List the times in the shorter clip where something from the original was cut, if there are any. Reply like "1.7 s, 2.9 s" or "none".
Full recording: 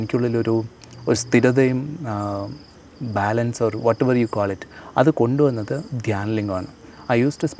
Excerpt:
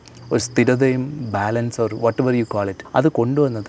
1.2 s, 2.8 s